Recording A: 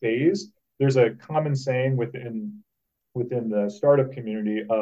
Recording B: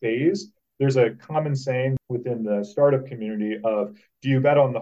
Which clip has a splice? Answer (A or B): B